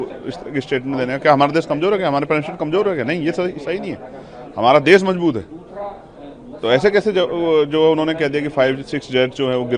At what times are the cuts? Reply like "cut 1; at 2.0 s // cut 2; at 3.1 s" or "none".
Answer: none

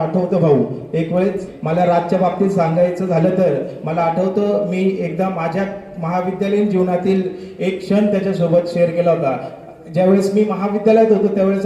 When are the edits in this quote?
cut 1; at 1.5 s

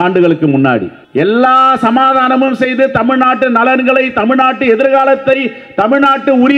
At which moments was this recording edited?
cut 1; at 1.0 s

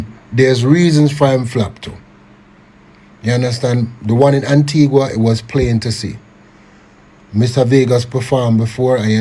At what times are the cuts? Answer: none

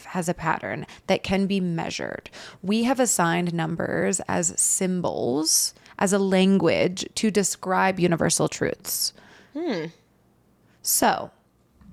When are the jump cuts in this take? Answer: none

